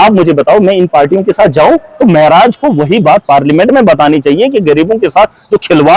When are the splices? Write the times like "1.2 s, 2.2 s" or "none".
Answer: 1.9 s